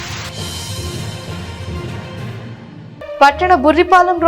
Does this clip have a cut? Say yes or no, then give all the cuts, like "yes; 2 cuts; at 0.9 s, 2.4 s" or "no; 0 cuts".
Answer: yes; 1 cut; at 2.8 s